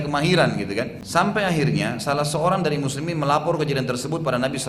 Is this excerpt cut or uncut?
cut